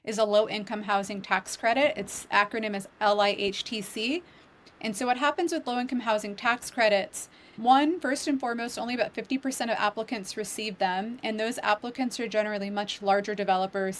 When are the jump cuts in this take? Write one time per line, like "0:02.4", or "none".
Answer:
none